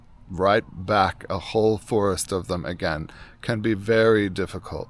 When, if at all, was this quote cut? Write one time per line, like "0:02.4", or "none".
none